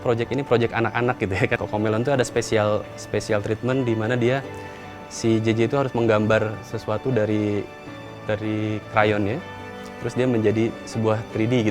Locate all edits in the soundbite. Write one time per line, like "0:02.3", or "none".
0:01.6

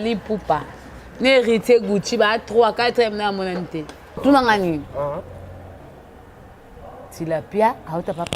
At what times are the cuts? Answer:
0:04.2

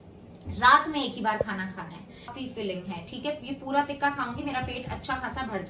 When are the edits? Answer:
0:02.3

